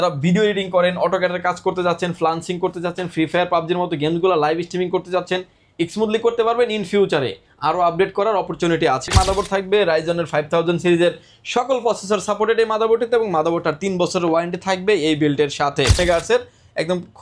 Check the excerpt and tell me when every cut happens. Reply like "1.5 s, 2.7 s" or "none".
9.1 s, 16.0 s